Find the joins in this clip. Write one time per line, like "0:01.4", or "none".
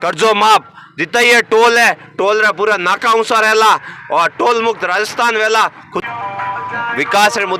0:05.9